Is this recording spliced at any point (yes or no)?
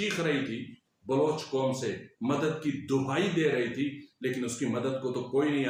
no